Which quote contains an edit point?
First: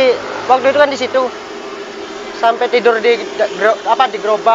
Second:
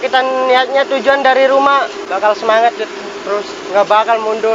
second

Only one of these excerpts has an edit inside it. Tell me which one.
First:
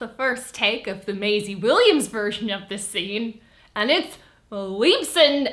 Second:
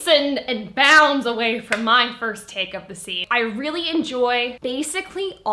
second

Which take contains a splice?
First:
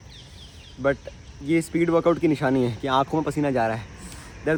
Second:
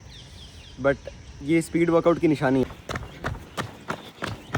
second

